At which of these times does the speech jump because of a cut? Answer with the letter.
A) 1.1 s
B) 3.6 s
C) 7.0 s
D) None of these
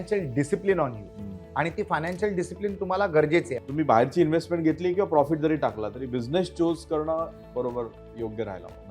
B